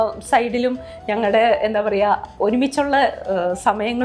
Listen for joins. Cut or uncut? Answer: uncut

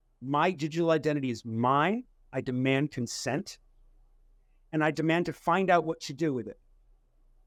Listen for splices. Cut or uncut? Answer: uncut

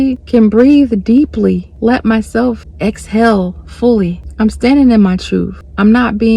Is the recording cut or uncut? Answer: cut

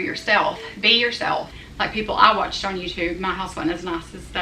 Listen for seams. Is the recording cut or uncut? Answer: cut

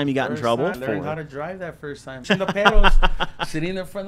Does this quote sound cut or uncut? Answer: cut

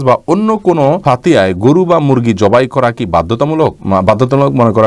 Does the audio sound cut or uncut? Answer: cut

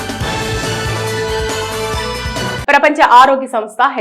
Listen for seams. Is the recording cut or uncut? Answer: cut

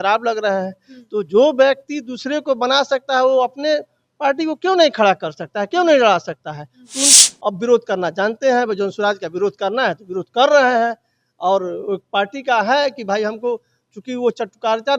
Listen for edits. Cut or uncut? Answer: cut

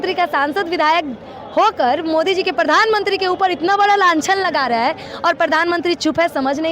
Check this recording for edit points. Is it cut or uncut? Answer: uncut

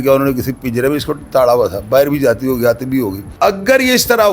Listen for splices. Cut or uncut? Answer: cut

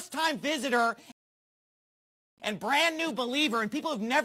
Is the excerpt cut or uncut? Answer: uncut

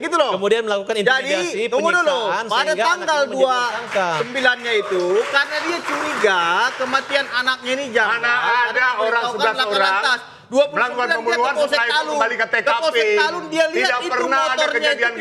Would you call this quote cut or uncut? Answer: uncut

